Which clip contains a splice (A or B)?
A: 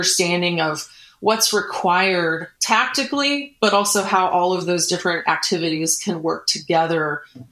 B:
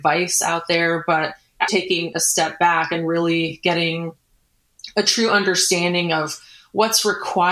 B